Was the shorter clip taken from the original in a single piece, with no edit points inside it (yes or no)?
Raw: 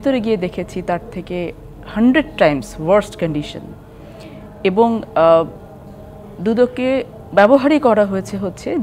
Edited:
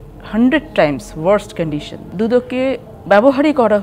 no